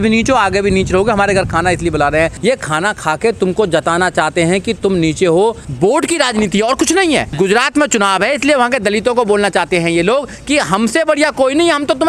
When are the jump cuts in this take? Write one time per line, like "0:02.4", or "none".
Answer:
0:02.4
0:05.7
0:07.3